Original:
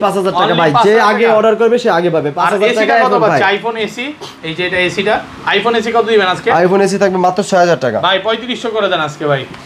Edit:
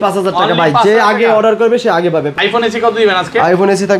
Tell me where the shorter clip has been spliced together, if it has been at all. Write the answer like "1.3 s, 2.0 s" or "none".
2.3 s